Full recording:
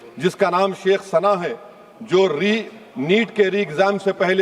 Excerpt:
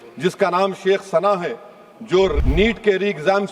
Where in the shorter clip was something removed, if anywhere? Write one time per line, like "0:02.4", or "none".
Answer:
0:02.4